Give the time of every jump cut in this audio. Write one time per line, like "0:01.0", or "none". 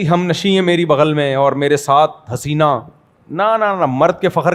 none